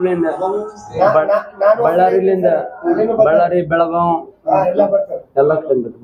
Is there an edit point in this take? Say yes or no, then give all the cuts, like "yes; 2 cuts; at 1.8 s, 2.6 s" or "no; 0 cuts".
no; 0 cuts